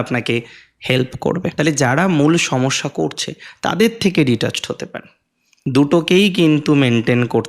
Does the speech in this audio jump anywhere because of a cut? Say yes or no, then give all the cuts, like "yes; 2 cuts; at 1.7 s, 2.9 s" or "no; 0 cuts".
yes; 2 cuts; at 1.5 s, 5.5 s